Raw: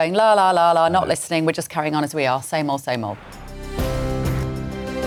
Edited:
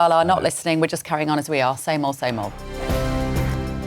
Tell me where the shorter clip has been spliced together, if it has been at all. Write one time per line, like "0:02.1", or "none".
0:02.6